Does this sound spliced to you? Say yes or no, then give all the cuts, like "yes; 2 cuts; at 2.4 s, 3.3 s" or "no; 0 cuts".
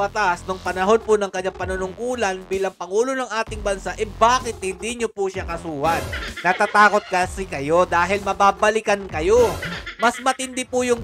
no; 0 cuts